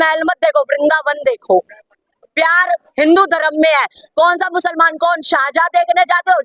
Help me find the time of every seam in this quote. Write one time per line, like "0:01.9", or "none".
none